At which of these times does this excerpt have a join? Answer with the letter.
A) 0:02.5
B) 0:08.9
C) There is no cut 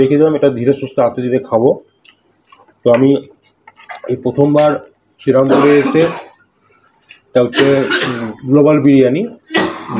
C